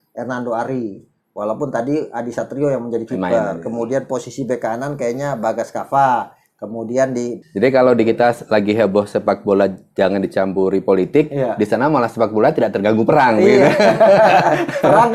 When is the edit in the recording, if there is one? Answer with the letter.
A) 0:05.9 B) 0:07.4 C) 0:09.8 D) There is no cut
B